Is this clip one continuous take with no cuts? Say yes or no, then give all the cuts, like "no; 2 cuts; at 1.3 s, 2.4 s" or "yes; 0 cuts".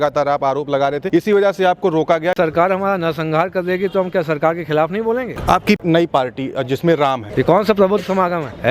no; 4 cuts; at 1.0 s, 2.3 s, 5.8 s, 7.2 s